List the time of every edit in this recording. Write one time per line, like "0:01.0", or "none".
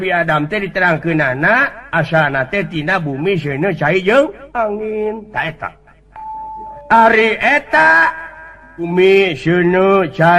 0:06.8
0:08.9